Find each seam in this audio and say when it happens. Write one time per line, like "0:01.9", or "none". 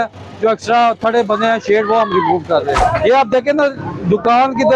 0:02.8